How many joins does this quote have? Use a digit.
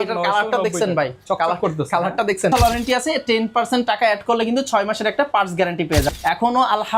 2